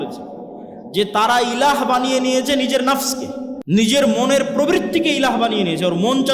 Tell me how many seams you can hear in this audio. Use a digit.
1